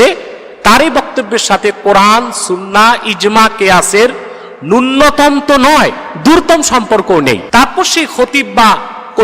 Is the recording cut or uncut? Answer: cut